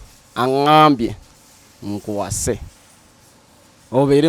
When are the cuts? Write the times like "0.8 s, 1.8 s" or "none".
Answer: none